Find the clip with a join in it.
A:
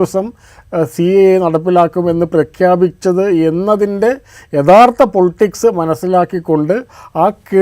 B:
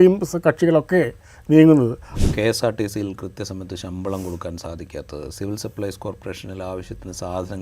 B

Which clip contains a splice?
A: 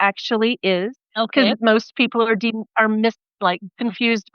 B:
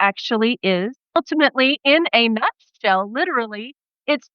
B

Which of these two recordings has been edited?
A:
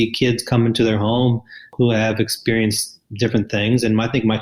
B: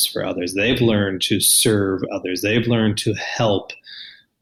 A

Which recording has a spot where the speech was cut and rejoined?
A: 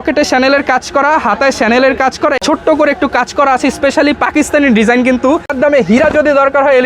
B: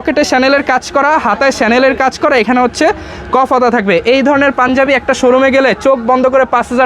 A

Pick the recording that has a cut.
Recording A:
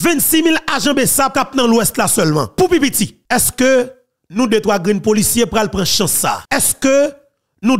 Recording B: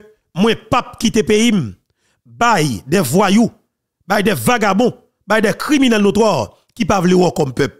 A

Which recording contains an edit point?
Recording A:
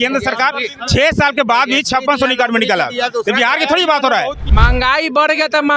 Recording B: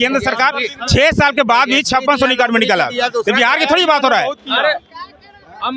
A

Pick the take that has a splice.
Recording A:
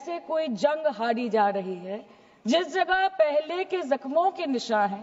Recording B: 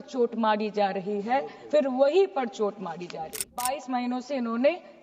B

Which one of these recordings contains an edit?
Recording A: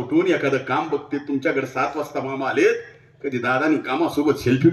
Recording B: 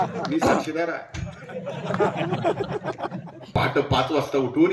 B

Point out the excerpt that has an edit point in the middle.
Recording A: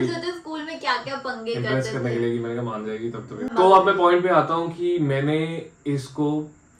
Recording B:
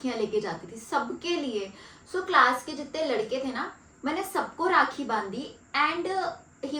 A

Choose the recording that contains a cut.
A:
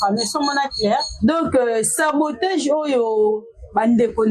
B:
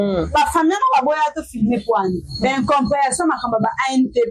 A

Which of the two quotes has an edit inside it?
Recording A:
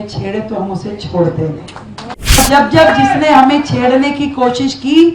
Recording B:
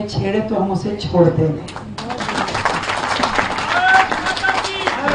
A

